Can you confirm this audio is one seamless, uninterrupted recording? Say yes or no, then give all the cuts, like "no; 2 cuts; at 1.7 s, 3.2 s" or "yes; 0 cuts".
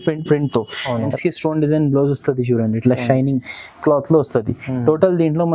no; 1 cut; at 1.1 s